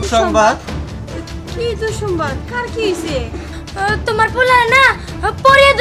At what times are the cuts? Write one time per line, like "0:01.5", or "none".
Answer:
none

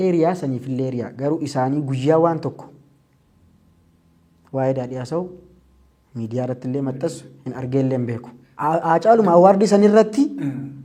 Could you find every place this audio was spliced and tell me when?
none

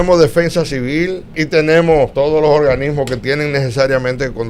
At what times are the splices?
0:01.4
0:02.1

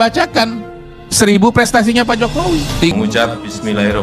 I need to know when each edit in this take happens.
0:02.9

